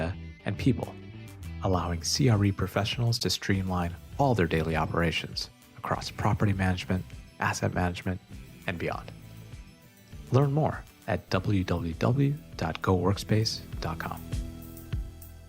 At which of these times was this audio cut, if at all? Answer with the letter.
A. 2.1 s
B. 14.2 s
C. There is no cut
B